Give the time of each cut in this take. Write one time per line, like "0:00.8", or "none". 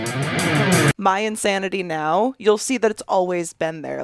0:01.0